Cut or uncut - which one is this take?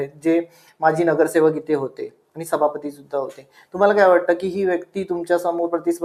uncut